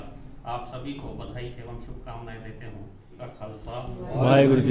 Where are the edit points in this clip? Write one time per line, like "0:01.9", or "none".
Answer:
0:03.1